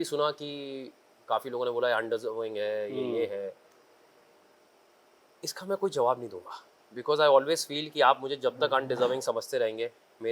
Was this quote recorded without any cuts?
yes; 0 cuts

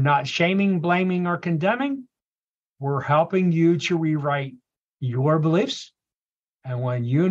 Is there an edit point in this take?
no; 0 cuts

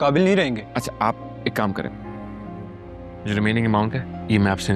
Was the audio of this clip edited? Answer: no; 0 cuts

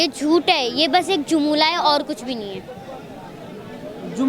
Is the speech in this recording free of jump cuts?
yes; 0 cuts

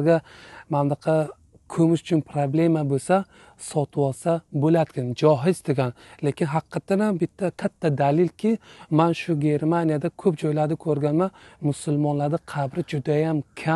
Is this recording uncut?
yes; 0 cuts

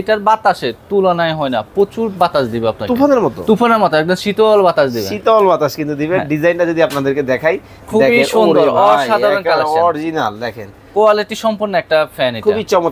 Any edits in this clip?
no; 0 cuts

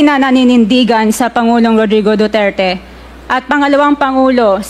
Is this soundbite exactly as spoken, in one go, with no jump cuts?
yes; 0 cuts

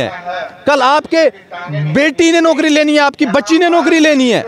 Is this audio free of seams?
yes; 0 cuts

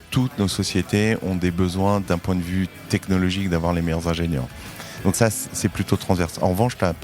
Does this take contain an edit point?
yes; 1 cut; at 5.2 s

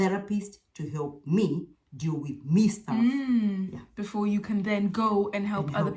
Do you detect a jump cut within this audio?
no; 0 cuts

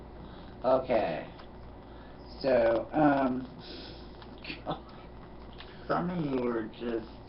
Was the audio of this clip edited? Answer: no; 0 cuts

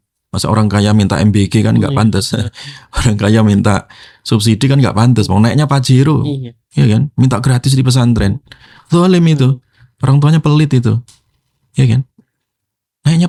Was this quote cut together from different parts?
no; 0 cuts

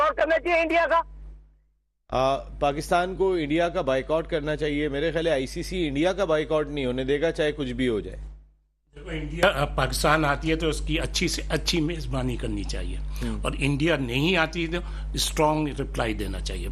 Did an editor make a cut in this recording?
no; 0 cuts

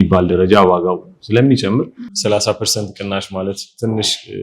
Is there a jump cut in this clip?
yes; 1 cut; at 2.0 s

